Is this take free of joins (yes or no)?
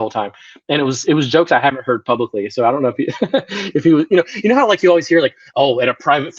yes